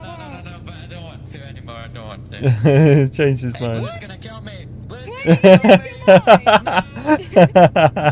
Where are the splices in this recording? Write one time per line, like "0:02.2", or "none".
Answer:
none